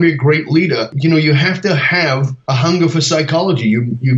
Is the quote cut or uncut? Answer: cut